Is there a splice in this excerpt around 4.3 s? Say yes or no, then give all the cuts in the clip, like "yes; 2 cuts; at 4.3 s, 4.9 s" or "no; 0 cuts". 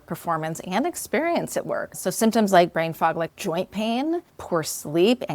yes; 3 cuts; at 1.9 s, 3.3 s, 4.3 s